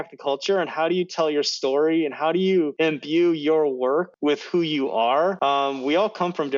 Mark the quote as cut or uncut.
cut